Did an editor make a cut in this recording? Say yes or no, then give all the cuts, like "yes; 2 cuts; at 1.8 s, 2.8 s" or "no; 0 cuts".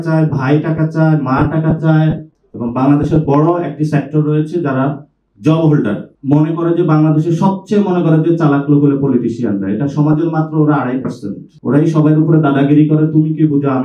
yes; 2 cuts; at 2.3 s, 6.1 s